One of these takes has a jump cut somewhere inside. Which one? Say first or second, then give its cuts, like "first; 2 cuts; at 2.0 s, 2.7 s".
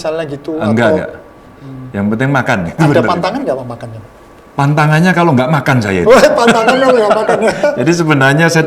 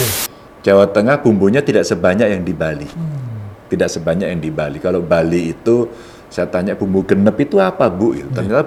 first; 1 cut; at 2.9 s